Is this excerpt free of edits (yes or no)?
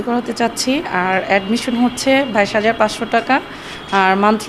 yes